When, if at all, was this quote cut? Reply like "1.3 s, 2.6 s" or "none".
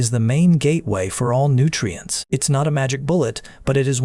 2.1 s